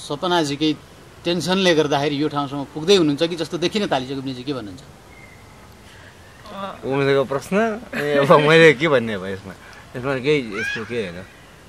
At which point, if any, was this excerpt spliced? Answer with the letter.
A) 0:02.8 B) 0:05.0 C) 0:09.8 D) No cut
D